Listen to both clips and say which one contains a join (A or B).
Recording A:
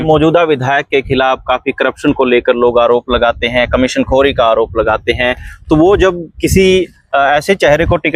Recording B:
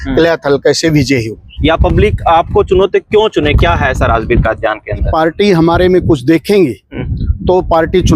B